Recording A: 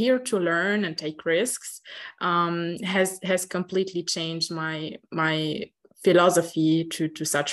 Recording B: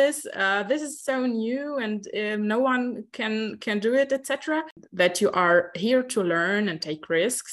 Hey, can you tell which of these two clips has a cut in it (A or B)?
B